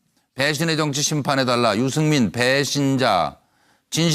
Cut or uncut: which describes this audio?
cut